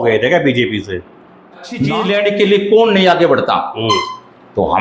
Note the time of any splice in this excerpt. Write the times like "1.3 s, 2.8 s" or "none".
1.9 s